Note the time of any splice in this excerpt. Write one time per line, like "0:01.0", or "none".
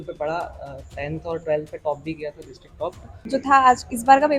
0:03.1